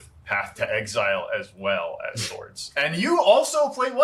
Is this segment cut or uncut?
uncut